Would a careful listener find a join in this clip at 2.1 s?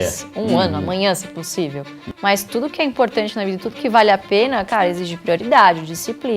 yes; 1 cut; at 2.1 s

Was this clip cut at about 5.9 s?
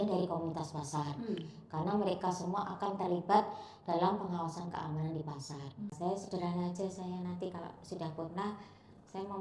yes; 1 cut; at 5.9 s

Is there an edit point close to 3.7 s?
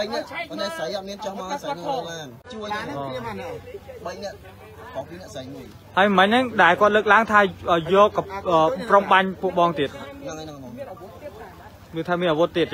no; 1 cut; at 2.4 s

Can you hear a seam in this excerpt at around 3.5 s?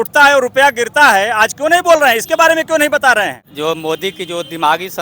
yes; 1 cut; at 3.5 s

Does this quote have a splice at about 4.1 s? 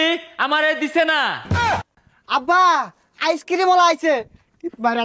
no; 1 cut; at 1.6 s

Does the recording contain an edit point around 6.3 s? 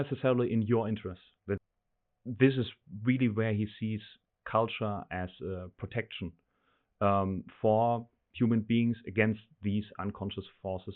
no; 1 cut; at 1.6 s

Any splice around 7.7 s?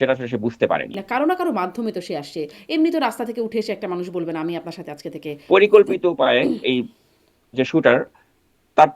no; 2 cuts; at 1.0 s, 5.3 s

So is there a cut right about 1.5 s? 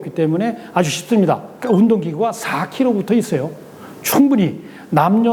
yes; 1 cut; at 1.5 s

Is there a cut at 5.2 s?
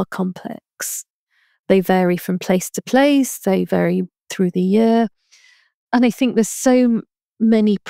no; 0 cuts

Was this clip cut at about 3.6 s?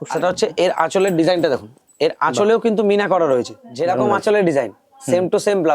yes; 1 cut; at 3.6 s

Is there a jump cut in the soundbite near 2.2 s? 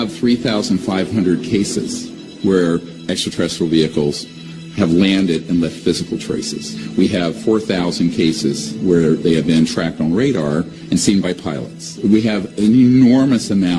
no; 1 cut; at 10.8 s

